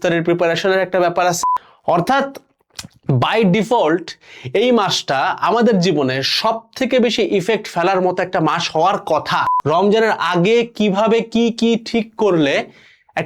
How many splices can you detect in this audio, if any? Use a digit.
2